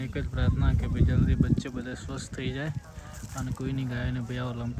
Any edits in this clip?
no; 0 cuts

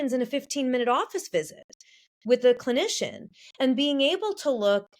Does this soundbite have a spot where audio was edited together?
no; 0 cuts

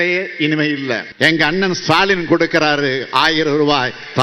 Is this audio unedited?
no; 1 cut; at 1.1 s

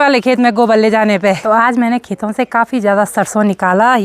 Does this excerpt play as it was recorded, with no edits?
no; 1 cut; at 1.4 s

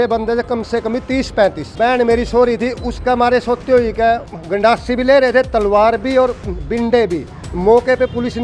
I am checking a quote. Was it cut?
yes; 2 cuts; at 1.6 s, 4.3 s

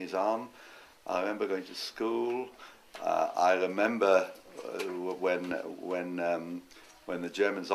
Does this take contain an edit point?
no; 0 cuts

